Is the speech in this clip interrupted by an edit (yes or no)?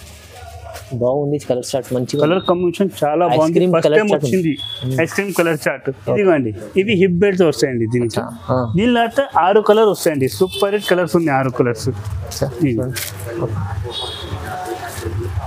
yes